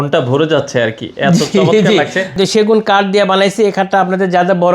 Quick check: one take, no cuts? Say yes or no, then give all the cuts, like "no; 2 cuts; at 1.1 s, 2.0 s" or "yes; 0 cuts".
no; 1 cut; at 2.4 s